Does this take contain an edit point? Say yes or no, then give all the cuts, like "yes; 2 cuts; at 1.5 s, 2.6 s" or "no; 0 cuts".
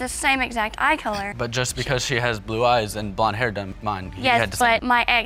no; 0 cuts